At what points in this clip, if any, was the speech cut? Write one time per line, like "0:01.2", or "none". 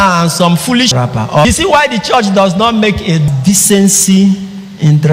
0:01.0
0:03.3